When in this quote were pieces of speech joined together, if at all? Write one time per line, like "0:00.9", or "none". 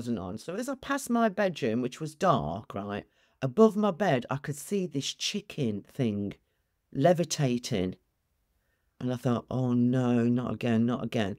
none